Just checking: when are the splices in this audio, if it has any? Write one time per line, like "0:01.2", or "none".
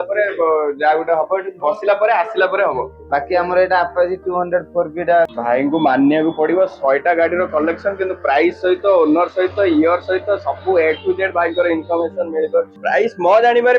0:05.4
0:12.7